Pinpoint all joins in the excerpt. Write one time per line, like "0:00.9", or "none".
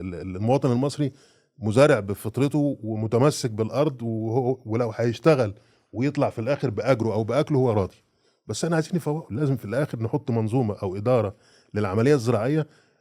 none